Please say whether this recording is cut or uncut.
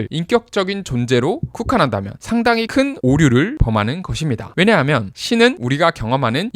cut